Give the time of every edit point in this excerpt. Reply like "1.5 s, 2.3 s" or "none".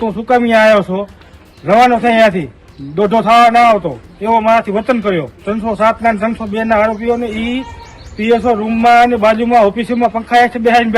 5.4 s